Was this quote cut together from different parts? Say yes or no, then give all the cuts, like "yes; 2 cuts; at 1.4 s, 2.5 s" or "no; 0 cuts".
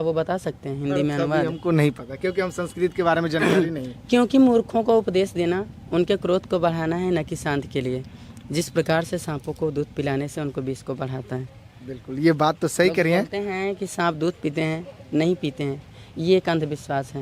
no; 0 cuts